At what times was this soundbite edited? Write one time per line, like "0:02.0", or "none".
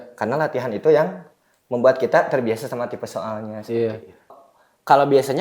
0:04.3